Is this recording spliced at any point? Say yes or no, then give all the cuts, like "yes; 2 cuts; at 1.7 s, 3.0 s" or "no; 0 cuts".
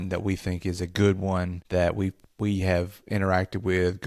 yes; 1 cut; at 1.6 s